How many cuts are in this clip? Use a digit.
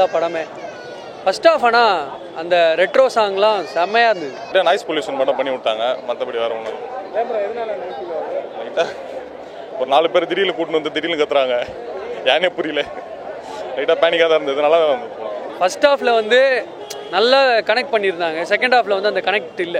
2